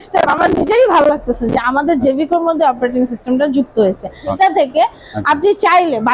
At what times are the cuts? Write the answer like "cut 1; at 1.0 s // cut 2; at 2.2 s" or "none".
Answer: cut 1; at 4.3 s